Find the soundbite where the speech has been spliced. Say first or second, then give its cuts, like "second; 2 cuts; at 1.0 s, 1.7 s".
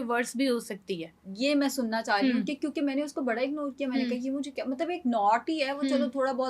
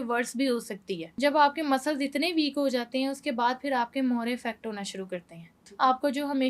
second; 2 cuts; at 1.0 s, 5.6 s